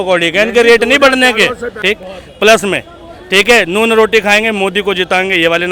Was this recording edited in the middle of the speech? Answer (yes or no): yes